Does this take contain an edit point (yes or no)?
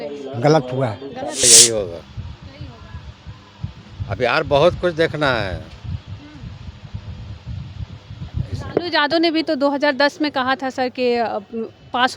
yes